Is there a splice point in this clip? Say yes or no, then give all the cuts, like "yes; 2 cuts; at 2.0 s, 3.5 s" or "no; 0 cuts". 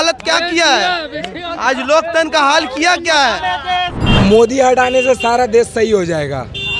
yes; 1 cut; at 4.0 s